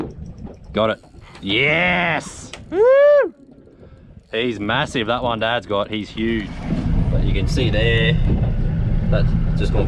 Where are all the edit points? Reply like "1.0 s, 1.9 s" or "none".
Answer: 6.5 s